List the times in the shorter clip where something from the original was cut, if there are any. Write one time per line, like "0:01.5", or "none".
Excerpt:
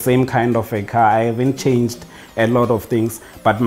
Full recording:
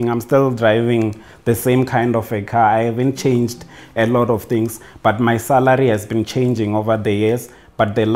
none